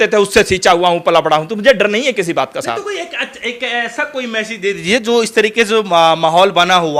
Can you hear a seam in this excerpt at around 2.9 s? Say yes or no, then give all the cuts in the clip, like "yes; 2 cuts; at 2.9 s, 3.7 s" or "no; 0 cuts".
no; 0 cuts